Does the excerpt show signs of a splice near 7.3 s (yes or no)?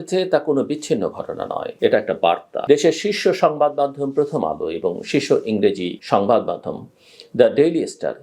no